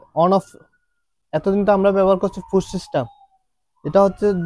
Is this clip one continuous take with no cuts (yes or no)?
yes